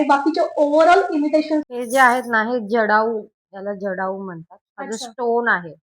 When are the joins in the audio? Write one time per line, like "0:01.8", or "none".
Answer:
0:01.6